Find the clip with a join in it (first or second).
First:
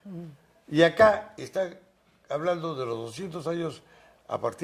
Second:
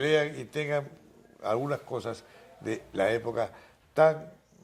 first